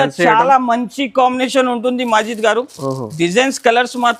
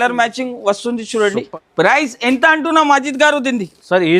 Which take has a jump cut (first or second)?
second